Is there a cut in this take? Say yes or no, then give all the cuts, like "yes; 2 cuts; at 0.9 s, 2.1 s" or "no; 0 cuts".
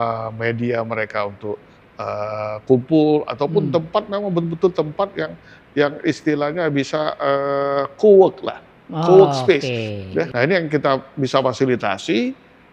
yes; 1 cut; at 10.3 s